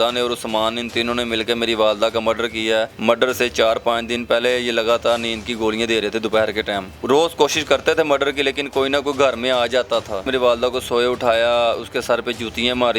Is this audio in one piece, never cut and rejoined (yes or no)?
no